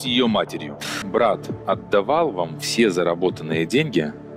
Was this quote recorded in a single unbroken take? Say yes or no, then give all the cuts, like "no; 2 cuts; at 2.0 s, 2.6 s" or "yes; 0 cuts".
no; 1 cut; at 0.9 s